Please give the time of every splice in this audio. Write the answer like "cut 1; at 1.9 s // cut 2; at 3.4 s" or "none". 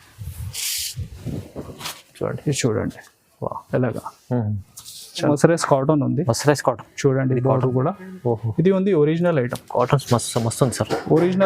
cut 1; at 5.3 s